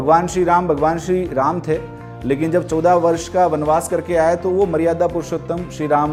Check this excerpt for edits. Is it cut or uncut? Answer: uncut